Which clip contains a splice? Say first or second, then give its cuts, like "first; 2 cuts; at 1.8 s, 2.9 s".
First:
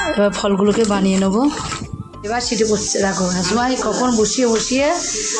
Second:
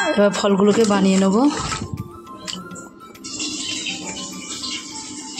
first; 1 cut; at 2.1 s